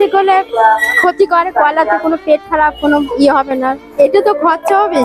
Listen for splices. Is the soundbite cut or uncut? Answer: cut